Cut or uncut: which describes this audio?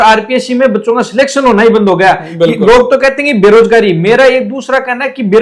uncut